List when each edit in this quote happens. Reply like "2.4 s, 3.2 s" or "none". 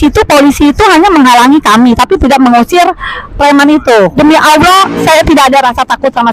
4.2 s